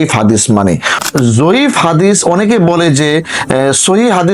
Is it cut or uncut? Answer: cut